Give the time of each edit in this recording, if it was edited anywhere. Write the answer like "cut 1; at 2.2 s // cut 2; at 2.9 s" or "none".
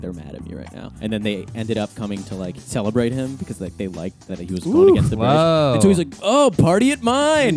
cut 1; at 0.9 s // cut 2; at 2.6 s // cut 3; at 4.2 s

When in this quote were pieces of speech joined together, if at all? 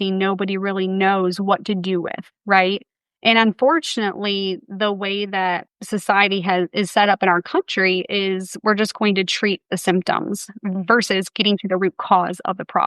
cut 1; at 5.7 s

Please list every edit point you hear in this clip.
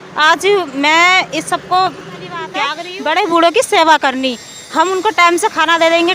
cut 1; at 2.7 s

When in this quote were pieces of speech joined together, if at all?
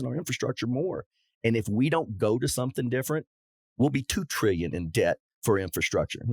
none

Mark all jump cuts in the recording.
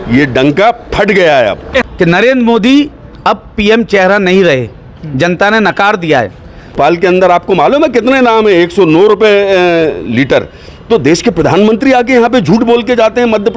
cut 1; at 1.9 s // cut 2; at 6.8 s

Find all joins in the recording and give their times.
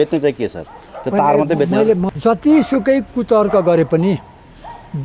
cut 1; at 2.1 s

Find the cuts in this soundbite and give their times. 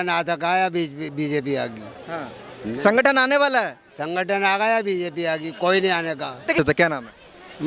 cut 1; at 6.6 s

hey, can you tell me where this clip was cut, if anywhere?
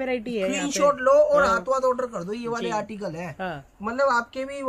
none

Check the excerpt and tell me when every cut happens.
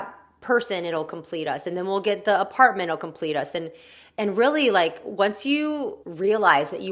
cut 1; at 6.0 s

